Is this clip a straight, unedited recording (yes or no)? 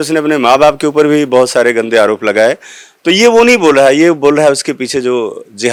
yes